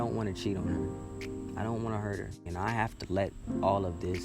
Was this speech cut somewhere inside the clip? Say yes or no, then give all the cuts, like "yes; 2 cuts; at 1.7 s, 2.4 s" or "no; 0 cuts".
yes; 1 cut; at 2.5 s